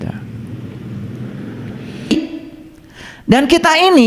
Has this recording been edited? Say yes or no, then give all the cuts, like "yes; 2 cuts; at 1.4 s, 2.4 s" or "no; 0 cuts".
yes; 1 cut; at 2.1 s